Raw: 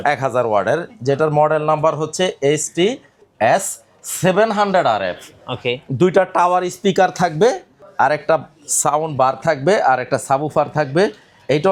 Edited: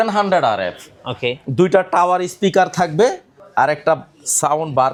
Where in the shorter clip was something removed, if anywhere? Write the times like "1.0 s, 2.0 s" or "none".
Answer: none